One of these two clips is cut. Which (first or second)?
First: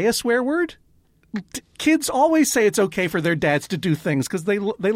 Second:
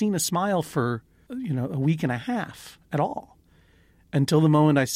second